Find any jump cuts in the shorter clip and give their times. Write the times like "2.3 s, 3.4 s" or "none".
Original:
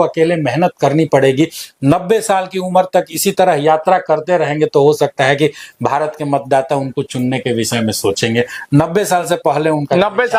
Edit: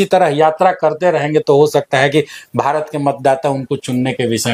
none